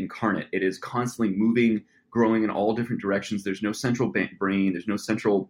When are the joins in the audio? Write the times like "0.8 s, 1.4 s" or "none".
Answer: none